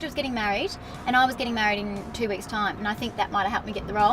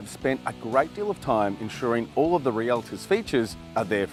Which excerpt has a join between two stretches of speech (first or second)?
first